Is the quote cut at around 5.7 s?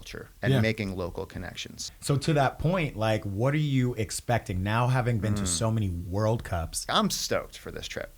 no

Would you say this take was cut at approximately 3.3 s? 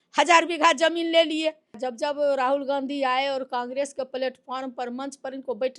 no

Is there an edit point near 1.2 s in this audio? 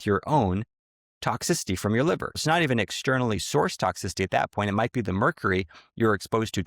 no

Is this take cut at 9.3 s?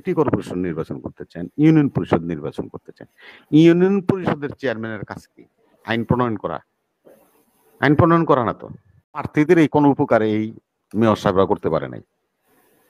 yes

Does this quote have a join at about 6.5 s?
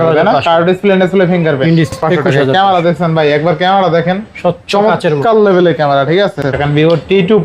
yes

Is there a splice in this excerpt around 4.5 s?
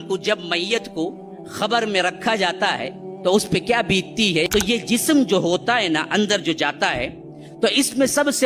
yes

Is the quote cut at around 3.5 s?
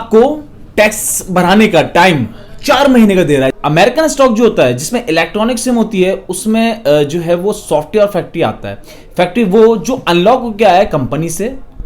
yes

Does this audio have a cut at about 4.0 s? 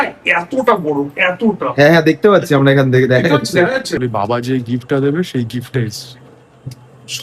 yes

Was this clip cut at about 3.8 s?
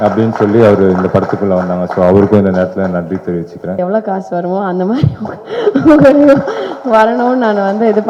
yes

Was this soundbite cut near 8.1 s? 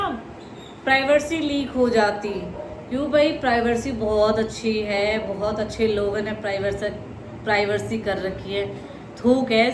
no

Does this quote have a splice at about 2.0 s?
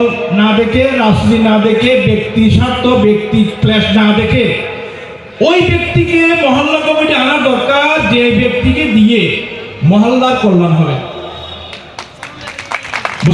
no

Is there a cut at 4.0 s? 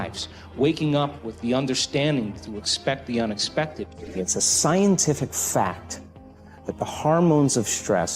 yes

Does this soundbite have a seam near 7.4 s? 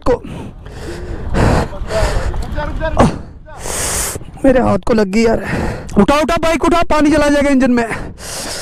no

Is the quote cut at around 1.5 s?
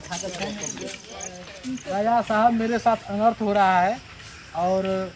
yes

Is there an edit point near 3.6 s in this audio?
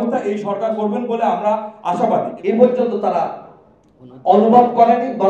no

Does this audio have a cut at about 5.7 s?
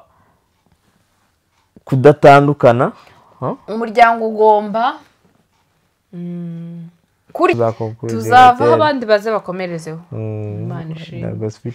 no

